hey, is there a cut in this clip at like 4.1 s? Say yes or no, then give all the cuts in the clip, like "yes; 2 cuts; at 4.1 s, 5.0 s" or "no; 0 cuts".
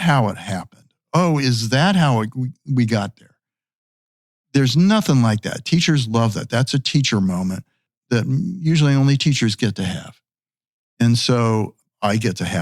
no; 2 cuts; at 8.0 s, 11.8 s